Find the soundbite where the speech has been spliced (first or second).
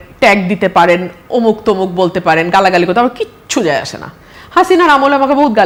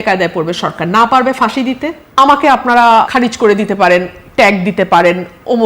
second